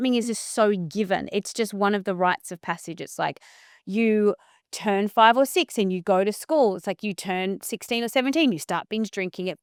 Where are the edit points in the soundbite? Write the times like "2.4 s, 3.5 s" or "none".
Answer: none